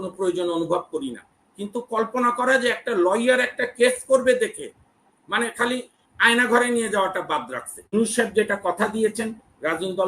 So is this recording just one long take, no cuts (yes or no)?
no